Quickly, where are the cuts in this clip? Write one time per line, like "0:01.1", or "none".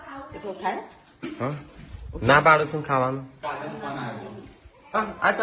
none